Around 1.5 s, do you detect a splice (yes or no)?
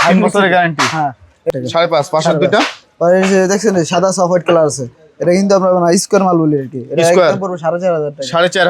yes